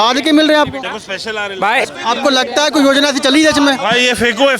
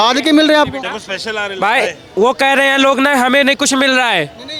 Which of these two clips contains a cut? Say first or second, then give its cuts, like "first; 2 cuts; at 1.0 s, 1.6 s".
first; 1 cut; at 1.9 s